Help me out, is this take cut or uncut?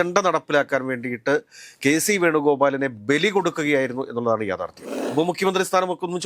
cut